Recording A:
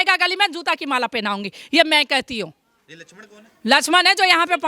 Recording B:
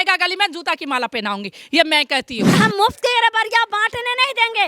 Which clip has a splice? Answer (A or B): B